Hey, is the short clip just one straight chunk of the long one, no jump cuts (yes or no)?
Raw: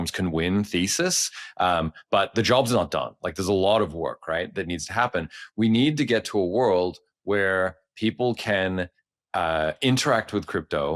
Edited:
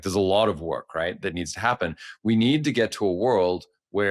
yes